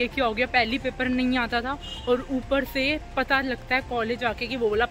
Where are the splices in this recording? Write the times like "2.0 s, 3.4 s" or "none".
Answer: none